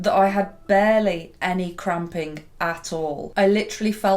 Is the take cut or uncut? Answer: cut